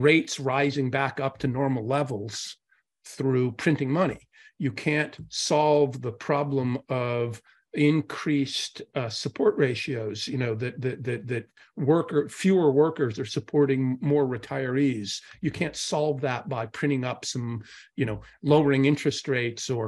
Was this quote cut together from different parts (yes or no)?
no